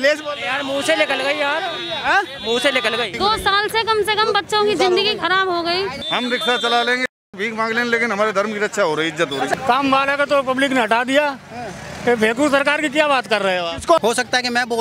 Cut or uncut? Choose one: cut